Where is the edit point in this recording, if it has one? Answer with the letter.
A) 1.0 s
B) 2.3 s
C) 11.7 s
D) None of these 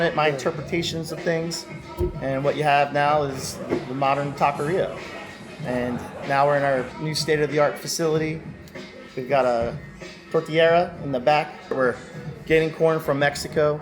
C